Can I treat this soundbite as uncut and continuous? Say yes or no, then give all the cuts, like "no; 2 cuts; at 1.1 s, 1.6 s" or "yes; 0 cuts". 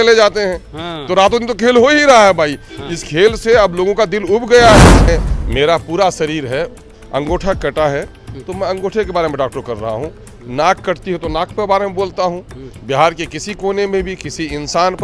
no; 1 cut; at 5.0 s